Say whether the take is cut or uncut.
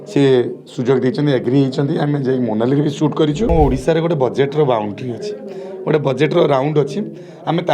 cut